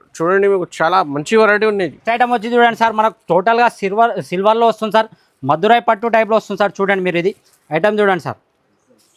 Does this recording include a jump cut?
no; 0 cuts

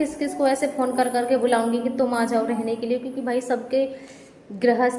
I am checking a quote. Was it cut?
no; 0 cuts

